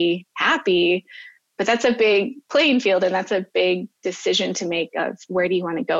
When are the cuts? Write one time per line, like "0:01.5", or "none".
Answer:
none